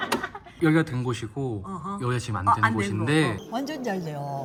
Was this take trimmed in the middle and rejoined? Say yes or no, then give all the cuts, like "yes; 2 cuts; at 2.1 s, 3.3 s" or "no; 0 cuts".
no; 0 cuts